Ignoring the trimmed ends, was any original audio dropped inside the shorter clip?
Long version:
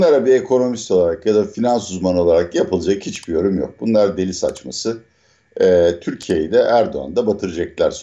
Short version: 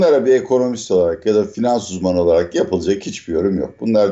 no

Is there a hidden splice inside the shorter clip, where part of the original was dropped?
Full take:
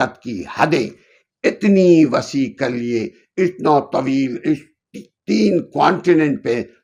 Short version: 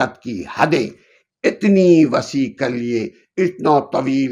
no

